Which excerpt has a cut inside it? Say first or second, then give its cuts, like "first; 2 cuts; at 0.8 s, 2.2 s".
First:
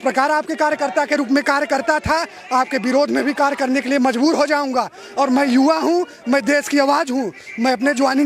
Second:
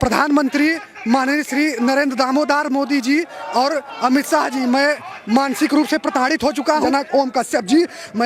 second; 1 cut; at 6.9 s